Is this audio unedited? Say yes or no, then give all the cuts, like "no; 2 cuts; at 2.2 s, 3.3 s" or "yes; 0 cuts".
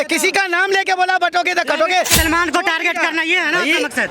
no; 1 cut; at 2.2 s